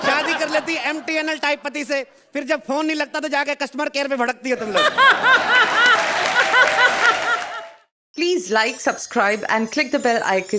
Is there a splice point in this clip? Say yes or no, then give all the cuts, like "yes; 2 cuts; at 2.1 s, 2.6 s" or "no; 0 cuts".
yes; 1 cut; at 7.5 s